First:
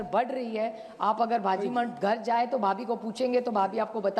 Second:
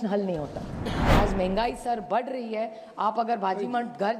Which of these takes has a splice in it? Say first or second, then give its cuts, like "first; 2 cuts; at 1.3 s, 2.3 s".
second; 1 cut; at 1.0 s